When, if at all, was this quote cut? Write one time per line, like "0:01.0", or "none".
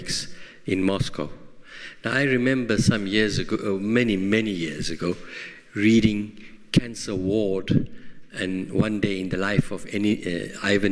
0:09.9